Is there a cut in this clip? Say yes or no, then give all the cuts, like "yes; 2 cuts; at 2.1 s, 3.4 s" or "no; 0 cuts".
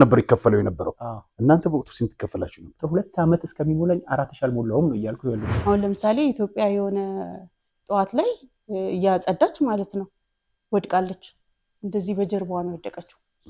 yes; 2 cuts; at 2.8 s, 5.5 s